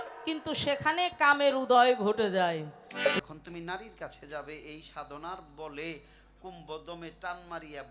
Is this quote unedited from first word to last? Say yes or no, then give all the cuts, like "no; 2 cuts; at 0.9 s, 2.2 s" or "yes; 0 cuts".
no; 1 cut; at 3.1 s